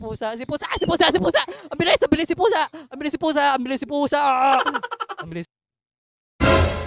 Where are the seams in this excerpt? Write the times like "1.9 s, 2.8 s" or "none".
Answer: 5.5 s